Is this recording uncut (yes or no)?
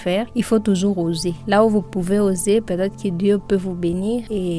yes